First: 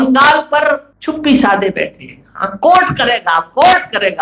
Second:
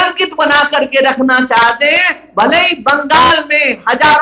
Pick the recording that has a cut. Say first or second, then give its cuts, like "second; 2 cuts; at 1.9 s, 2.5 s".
first; 1 cut; at 0.9 s